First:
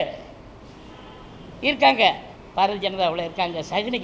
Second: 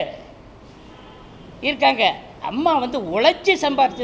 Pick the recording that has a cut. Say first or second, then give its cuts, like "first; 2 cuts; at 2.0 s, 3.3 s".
first; 1 cut; at 2.3 s